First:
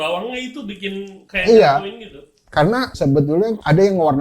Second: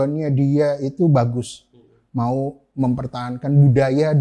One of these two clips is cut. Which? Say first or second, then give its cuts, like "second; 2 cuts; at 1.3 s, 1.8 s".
first; 2 cuts; at 1.2 s, 3.0 s